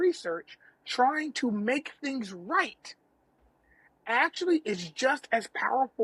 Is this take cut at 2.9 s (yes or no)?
no